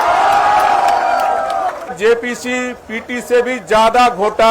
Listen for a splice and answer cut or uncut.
cut